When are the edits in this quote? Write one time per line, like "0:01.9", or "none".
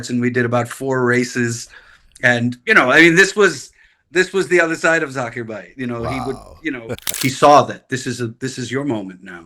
0:07.0